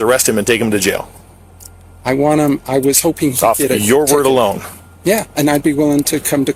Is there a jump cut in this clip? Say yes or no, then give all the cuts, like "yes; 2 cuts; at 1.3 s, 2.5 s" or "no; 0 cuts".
no; 0 cuts